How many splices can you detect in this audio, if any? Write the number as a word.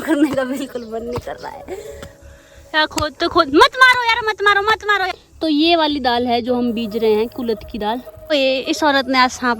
three